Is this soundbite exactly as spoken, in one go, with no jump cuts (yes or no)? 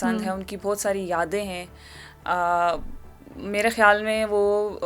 yes